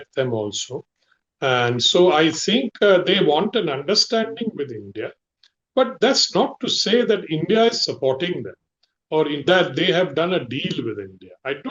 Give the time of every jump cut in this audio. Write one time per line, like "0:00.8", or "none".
none